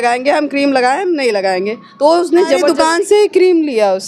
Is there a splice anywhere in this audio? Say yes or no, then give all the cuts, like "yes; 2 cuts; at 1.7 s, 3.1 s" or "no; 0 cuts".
yes; 1 cut; at 2.6 s